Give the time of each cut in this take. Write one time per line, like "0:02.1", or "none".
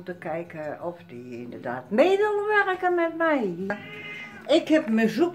0:03.7